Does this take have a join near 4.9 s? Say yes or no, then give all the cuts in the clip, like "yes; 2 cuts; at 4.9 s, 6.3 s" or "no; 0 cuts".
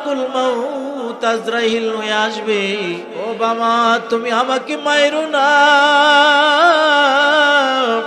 no; 1 cut; at 3.1 s